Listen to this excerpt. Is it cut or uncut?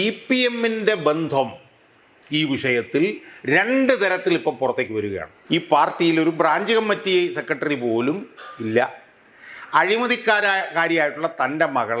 cut